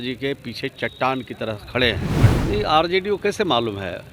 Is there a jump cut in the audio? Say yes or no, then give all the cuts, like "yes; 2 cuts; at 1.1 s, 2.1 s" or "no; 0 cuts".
yes; 1 cut; at 2.2 s